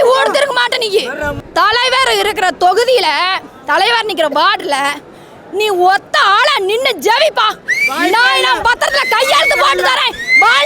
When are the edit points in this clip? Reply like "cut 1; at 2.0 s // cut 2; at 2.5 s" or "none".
cut 1; at 1.3 s